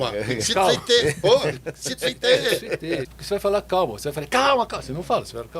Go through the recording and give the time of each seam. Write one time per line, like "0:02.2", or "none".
0:03.1